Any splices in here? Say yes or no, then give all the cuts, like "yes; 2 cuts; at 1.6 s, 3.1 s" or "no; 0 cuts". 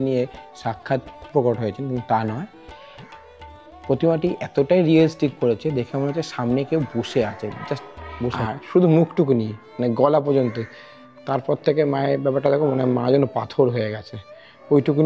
yes; 1 cut; at 8.4 s